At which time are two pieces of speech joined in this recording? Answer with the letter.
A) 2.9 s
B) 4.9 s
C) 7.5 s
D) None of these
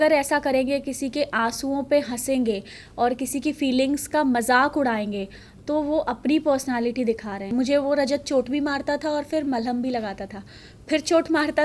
C